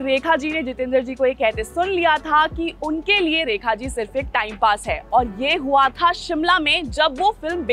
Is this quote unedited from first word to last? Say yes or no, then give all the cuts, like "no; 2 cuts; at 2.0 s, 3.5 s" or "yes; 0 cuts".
yes; 0 cuts